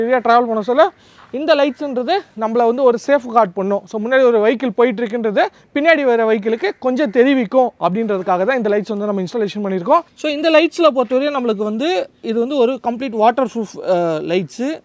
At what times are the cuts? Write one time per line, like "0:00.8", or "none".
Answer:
0:10.1